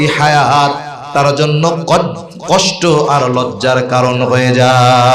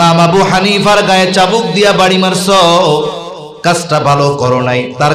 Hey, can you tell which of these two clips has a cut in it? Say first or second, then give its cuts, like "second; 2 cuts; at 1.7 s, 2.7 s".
first; 1 cut; at 1.0 s